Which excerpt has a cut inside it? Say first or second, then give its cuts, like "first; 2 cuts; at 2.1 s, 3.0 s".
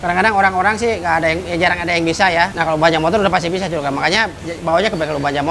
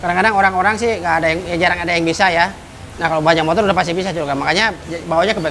first; 1 cut; at 2.5 s